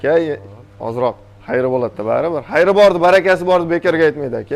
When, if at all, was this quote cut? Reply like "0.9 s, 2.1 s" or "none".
none